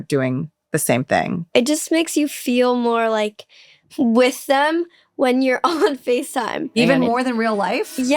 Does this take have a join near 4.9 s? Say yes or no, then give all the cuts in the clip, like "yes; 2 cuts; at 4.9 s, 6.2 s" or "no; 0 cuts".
no; 1 cut; at 1.5 s